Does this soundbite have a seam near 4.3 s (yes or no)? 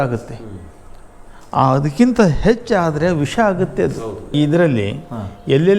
yes